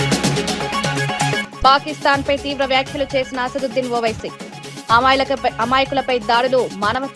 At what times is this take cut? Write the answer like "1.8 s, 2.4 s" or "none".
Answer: 1.4 s